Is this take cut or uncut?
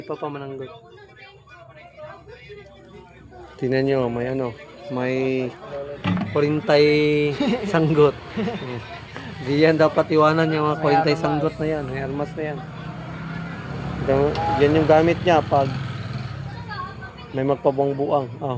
uncut